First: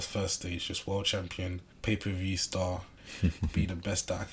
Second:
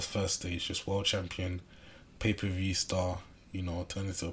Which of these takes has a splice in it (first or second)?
first